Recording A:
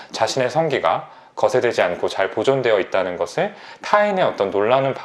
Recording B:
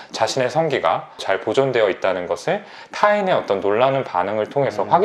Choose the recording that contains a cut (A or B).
B